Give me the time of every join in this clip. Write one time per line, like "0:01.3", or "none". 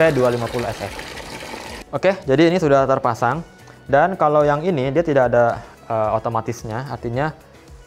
0:01.7